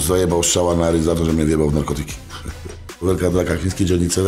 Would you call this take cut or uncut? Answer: cut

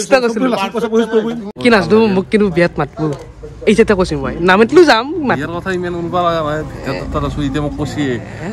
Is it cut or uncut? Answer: cut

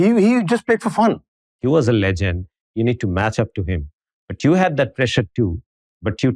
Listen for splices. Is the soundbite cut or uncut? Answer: cut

